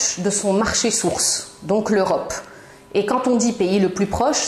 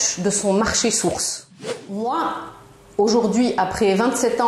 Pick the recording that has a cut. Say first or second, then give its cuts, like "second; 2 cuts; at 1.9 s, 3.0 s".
second; 1 cut; at 1.6 s